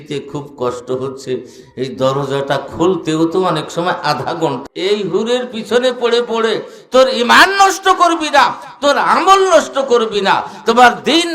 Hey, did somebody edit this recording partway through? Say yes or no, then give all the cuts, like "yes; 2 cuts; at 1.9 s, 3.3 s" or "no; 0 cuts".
yes; 1 cut; at 4.6 s